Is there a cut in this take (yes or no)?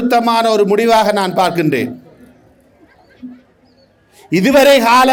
no